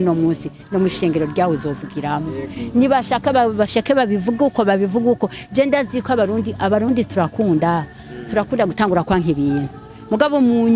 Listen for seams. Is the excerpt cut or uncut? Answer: uncut